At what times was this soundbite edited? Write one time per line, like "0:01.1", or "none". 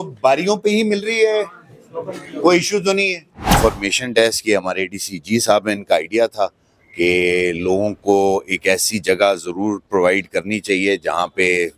0:03.6